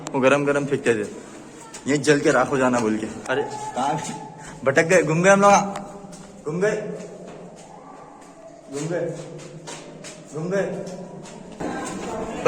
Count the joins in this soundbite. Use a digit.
2